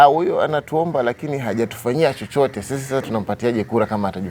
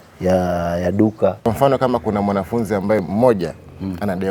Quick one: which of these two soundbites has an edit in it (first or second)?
second